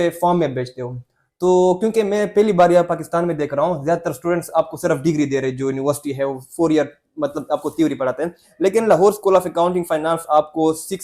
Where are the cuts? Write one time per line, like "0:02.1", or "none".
none